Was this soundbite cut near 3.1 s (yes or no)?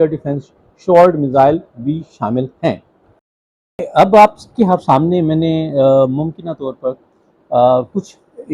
yes